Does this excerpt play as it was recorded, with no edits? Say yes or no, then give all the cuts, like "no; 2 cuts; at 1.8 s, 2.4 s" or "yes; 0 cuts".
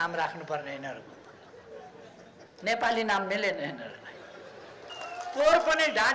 no; 1 cut; at 4.9 s